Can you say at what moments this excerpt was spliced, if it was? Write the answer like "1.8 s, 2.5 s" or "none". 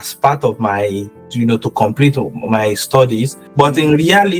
3.4 s